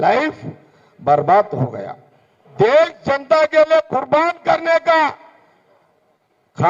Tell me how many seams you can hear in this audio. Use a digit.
1